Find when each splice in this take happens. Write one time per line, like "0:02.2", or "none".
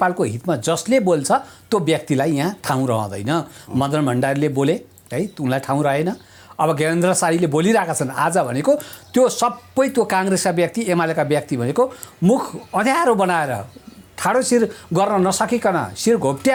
none